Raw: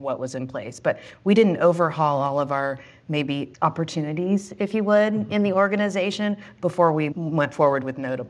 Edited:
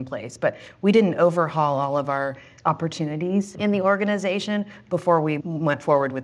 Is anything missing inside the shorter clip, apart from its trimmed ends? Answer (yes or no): yes